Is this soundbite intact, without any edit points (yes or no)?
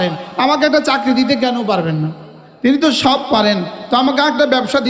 yes